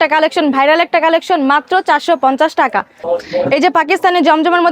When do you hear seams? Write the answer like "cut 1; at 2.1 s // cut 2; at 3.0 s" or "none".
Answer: cut 1; at 2.9 s